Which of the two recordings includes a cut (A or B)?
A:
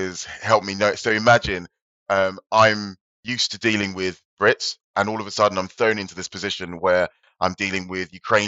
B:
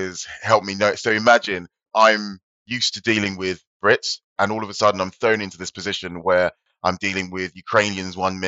B